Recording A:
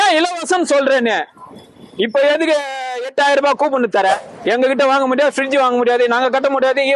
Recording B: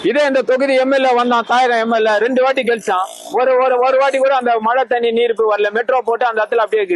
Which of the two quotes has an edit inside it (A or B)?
A